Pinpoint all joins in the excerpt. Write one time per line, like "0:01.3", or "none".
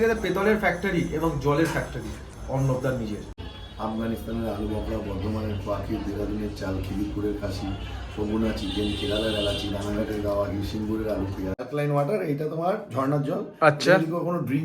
0:03.3
0:11.6

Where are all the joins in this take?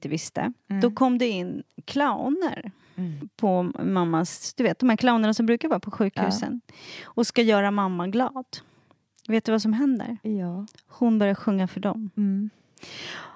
0:03.2

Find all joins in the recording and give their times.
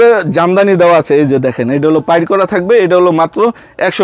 none

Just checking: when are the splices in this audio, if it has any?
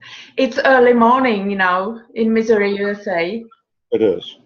none

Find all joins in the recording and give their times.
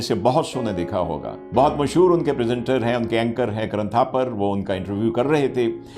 0:01.3

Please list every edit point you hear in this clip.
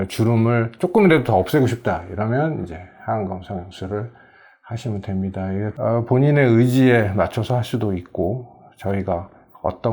0:05.7

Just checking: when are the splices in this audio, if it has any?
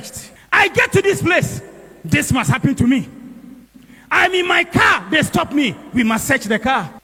none

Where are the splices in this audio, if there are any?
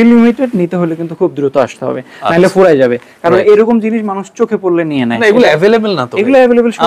none

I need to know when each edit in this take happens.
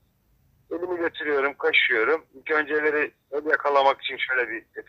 none

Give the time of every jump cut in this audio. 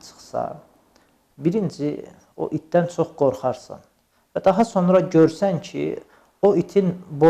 none

